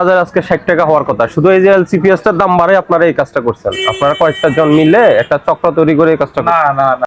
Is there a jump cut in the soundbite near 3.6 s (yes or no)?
no